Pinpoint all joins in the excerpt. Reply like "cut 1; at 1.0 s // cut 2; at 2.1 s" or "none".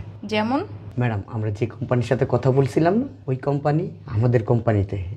none